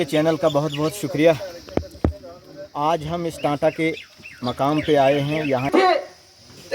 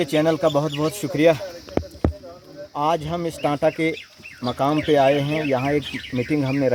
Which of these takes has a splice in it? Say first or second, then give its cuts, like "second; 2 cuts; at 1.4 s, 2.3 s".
first; 1 cut; at 5.7 s